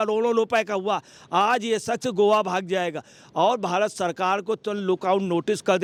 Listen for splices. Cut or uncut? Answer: uncut